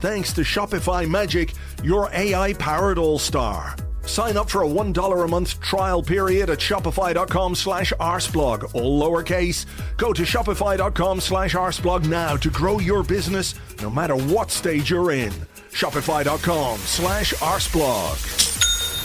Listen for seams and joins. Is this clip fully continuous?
yes; 0 cuts

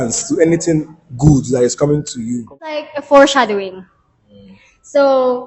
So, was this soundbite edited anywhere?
yes; 1 cut; at 2.9 s

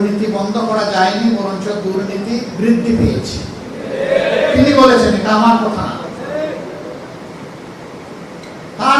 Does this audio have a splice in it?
no; 0 cuts

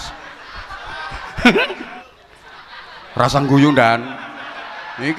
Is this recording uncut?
no; 1 cut; at 2.0 s

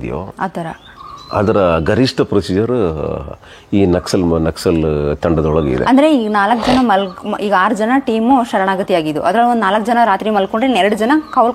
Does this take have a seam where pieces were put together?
no; 0 cuts

